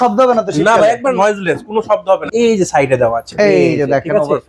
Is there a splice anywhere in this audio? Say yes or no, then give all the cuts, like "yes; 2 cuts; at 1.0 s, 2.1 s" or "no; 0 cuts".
yes; 2 cuts; at 1.1 s, 2.3 s